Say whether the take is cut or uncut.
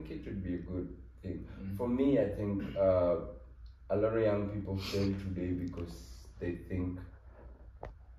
uncut